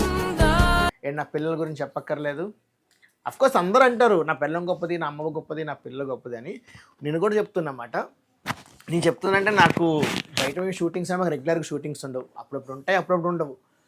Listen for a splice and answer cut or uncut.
uncut